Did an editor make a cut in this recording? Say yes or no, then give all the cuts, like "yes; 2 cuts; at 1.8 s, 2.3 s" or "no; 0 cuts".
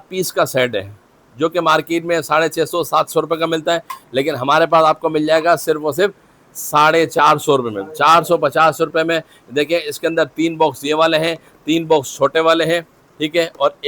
no; 0 cuts